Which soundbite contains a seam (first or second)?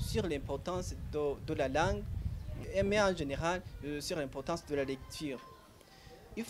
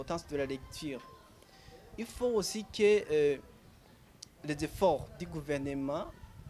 first